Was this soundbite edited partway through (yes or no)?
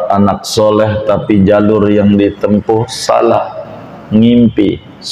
no